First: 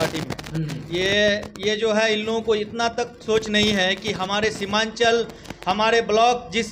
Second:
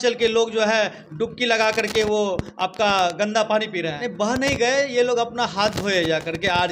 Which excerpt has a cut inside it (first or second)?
second